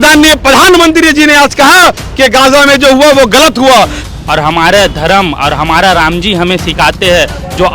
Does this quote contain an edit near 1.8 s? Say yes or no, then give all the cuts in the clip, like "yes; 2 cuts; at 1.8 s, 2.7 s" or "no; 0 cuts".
no; 1 cut; at 4.0 s